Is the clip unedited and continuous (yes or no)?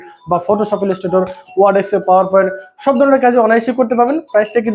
yes